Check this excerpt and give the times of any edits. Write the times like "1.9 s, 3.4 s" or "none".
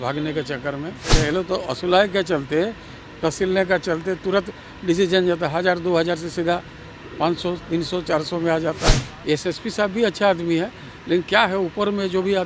1.1 s, 9.0 s

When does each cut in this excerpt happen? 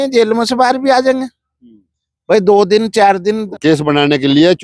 3.4 s

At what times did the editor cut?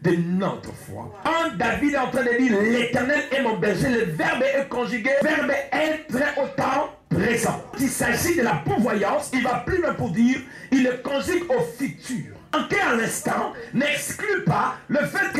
1.3 s, 5.2 s, 7.7 s, 12.5 s

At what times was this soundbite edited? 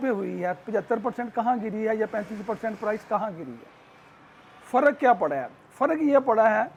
none

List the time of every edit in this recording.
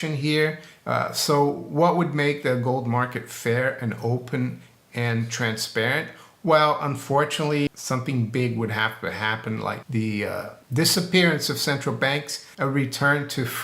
7.7 s, 9.8 s, 10.6 s, 12.4 s

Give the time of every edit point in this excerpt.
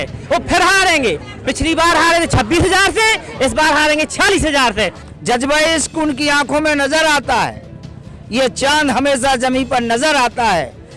5.0 s

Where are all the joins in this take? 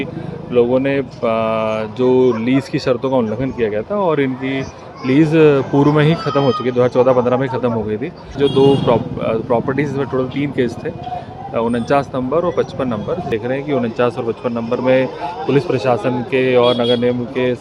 8.4 s, 13.3 s

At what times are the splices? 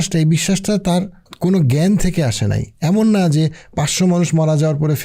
1.2 s

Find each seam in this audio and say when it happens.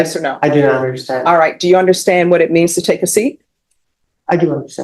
none

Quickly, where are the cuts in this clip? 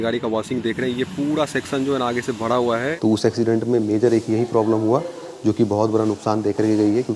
2.9 s

